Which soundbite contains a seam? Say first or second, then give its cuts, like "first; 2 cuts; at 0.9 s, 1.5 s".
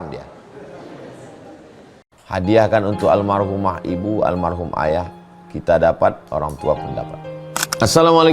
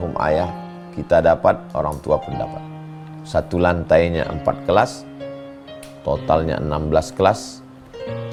first; 1 cut; at 2.0 s